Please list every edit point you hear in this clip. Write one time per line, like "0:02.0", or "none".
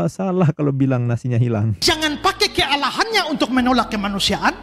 0:01.7